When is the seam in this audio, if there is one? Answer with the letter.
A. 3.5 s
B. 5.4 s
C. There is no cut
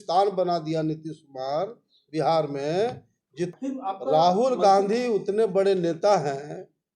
A